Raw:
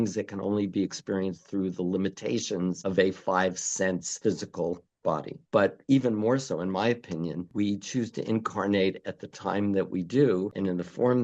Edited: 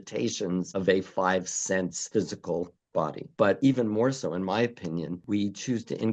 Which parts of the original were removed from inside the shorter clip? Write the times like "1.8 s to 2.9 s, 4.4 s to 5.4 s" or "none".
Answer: 5.5 s to 5.7 s